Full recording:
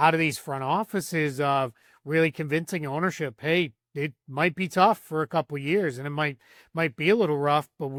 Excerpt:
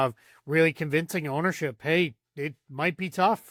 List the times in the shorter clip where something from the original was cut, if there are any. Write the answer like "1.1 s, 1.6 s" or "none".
none